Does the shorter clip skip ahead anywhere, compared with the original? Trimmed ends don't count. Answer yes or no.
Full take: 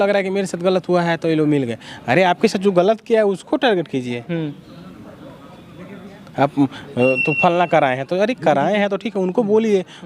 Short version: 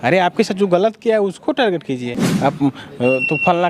yes